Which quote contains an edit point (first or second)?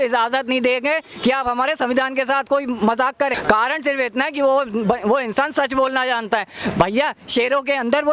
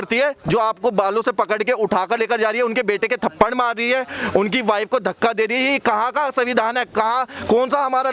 first